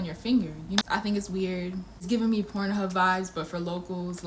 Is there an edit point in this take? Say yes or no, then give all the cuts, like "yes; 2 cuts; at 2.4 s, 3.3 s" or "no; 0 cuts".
yes; 2 cuts; at 0.9 s, 2.0 s